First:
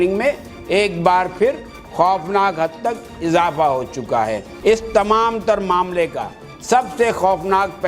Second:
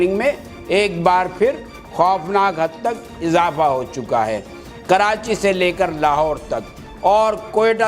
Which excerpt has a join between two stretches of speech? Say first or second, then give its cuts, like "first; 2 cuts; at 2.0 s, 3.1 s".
first; 1 cut; at 4.5 s